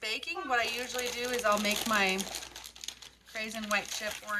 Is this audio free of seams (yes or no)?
yes